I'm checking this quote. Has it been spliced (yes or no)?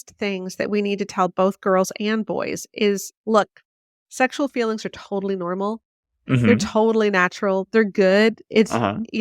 yes